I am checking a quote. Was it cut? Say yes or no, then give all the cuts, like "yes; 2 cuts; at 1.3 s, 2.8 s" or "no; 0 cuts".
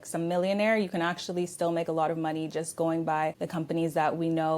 yes; 1 cut; at 3.4 s